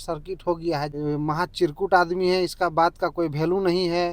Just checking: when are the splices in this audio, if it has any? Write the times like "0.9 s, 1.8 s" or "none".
0.9 s